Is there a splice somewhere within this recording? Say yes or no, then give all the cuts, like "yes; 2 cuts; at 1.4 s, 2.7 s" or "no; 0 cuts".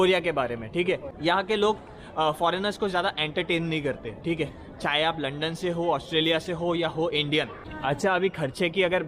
yes; 2 cuts; at 1.1 s, 7.6 s